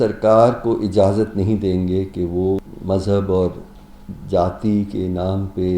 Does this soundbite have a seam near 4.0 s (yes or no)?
no